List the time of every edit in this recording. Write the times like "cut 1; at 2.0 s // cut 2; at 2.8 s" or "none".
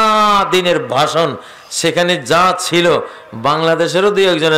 none